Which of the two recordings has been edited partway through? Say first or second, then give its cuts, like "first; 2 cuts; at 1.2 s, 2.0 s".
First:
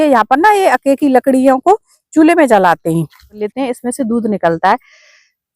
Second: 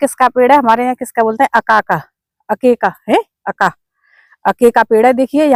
first; 1 cut; at 3.4 s